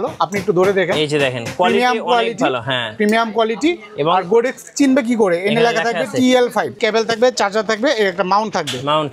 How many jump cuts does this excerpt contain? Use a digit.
1